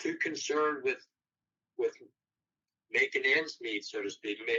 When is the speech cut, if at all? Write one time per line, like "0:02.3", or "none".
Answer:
none